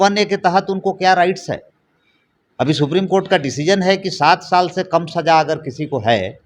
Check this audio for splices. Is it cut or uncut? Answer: uncut